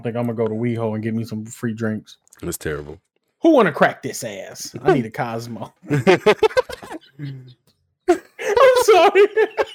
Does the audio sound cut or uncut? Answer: uncut